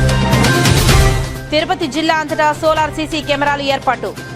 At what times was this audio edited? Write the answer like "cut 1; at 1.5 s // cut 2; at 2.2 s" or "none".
cut 1; at 1.3 s